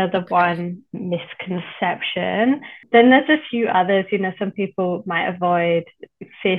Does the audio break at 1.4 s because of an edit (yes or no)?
no